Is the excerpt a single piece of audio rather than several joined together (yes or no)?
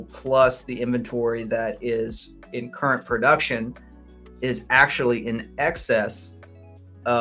yes